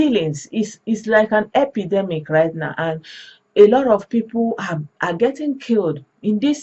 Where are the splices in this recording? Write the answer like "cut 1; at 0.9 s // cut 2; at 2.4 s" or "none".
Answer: none